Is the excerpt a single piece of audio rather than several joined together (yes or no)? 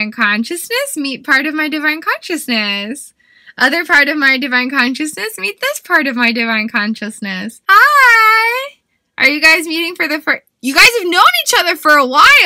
no